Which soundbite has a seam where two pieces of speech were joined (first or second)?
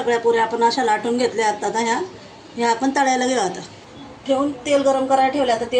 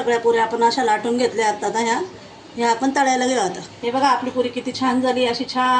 second